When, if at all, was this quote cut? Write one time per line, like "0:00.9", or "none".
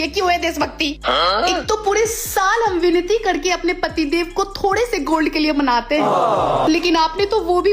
0:06.6